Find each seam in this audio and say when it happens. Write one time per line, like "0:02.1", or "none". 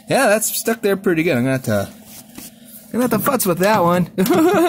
none